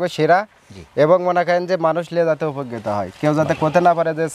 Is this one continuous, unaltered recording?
yes; 0 cuts

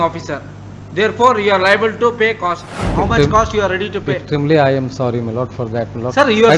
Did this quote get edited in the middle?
yes; 1 cut; at 2.8 s

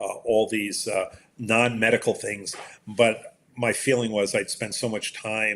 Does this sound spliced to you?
no; 0 cuts

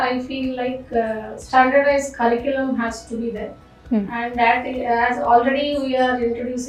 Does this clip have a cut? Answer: no; 0 cuts

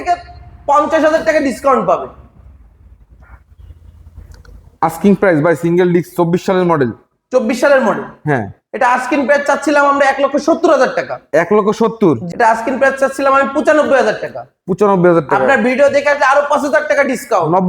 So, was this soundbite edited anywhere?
yes; 1 cut; at 12.3 s

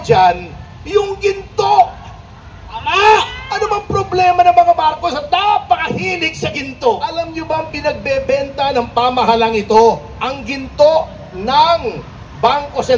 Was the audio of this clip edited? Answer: yes; 1 cut; at 7.3 s

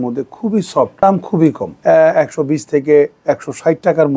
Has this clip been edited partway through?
yes; 2 cuts; at 0.9 s, 1.7 s

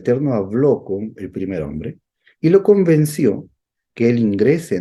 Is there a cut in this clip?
no; 0 cuts

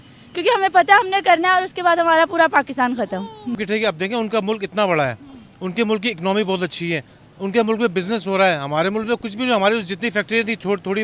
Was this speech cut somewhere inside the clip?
yes; 1 cut; at 3.6 s

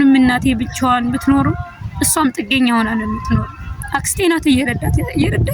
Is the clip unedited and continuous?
yes; 0 cuts

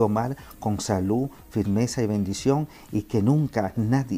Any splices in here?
no; 0 cuts

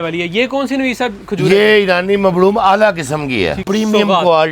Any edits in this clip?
yes; 1 cut; at 3.6 s

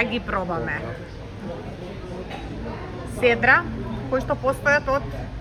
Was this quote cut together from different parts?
no; 0 cuts

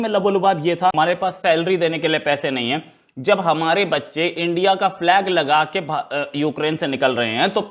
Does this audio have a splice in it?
yes; 1 cut; at 0.9 s

